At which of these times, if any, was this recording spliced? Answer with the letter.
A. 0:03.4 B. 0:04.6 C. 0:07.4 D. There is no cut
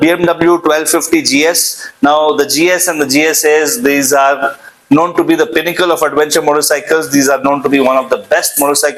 D